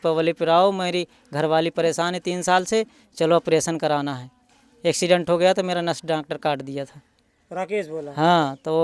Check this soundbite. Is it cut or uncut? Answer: uncut